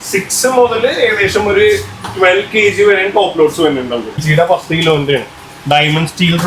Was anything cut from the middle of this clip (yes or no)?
yes